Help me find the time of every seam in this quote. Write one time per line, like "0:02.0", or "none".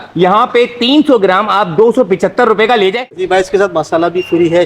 0:03.2